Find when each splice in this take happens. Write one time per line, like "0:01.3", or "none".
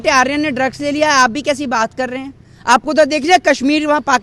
none